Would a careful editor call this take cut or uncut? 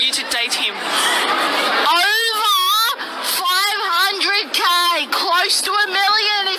uncut